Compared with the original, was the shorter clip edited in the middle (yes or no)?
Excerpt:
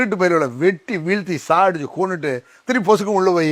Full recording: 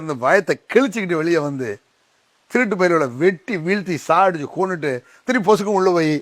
no